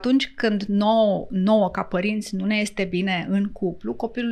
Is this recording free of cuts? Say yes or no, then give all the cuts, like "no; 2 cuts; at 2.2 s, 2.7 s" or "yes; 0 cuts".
yes; 0 cuts